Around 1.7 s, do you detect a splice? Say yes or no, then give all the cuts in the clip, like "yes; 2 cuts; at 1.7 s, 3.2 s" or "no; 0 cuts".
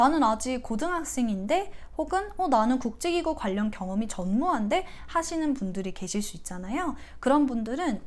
no; 0 cuts